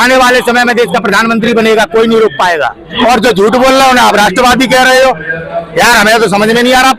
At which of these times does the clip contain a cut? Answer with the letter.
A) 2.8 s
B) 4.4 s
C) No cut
A